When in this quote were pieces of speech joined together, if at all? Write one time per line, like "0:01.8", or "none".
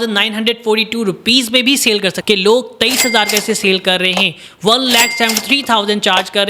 0:02.2

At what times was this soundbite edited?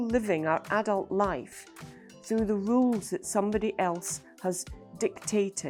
none

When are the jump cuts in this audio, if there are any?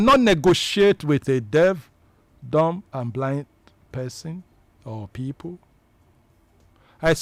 none

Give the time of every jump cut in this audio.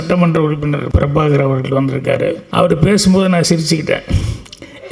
0:00.9
0:02.4

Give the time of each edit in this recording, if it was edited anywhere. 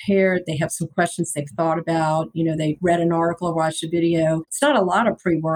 0:02.8
0:04.5

